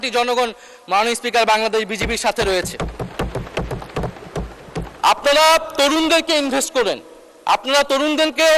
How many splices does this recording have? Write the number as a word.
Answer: one